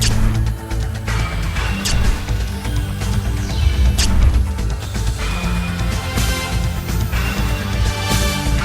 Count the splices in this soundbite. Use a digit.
1